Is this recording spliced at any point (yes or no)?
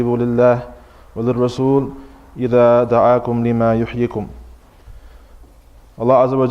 yes